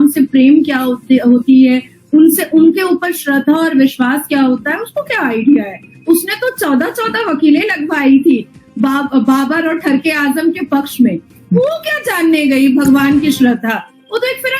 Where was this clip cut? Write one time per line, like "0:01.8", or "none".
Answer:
0:13.6